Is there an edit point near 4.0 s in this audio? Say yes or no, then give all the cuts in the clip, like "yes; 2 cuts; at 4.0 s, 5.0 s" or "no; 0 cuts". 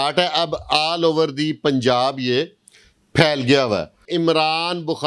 yes; 1 cut; at 4.0 s